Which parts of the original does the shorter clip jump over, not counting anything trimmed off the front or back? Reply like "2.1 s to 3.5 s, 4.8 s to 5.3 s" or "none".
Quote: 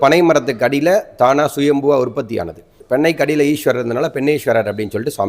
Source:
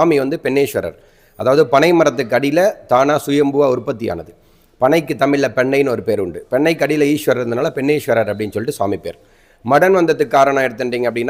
4.4 s to 6.4 s